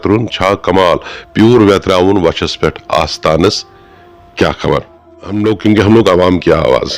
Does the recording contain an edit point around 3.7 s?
no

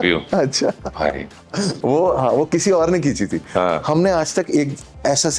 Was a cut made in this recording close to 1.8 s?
yes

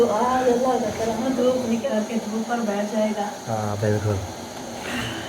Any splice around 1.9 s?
yes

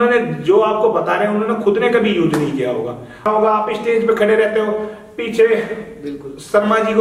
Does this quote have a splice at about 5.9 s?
no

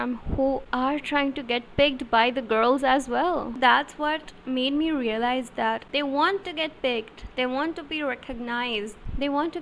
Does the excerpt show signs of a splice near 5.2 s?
no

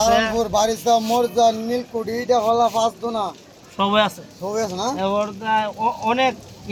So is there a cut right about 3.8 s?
no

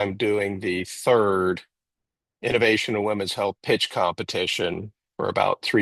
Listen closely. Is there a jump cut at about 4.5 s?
no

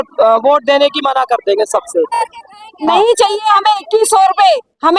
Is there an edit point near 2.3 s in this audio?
yes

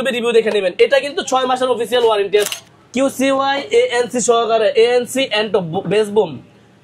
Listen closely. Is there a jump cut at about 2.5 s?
yes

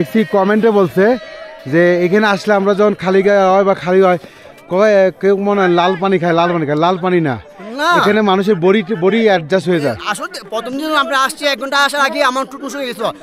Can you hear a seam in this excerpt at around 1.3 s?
no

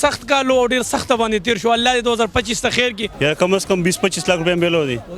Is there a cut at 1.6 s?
no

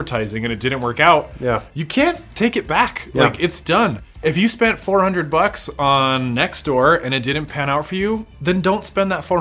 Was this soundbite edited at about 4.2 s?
yes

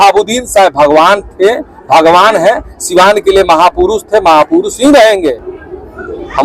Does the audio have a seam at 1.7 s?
no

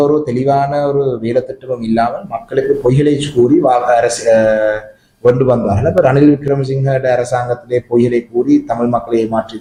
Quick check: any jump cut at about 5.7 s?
no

